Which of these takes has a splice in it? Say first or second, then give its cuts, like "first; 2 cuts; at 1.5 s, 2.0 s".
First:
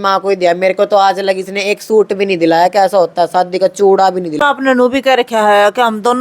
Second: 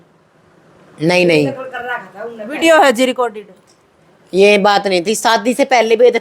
first; 1 cut; at 4.4 s